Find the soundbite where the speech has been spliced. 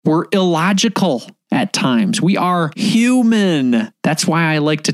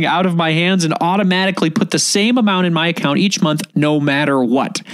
first; 3 cuts; at 1.3 s, 2.7 s, 3.9 s

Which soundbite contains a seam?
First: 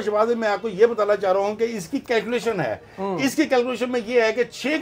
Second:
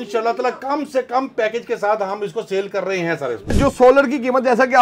second; 1 cut; at 3.5 s

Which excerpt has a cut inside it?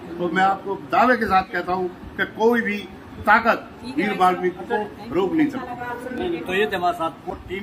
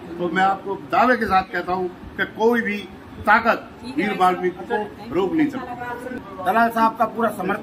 second; 1 cut; at 6.1 s

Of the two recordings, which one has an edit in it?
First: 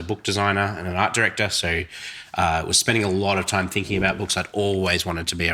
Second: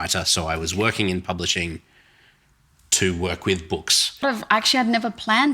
second; 1 cut; at 4.2 s

